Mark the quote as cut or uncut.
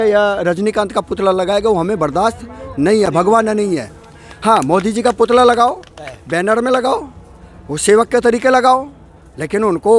uncut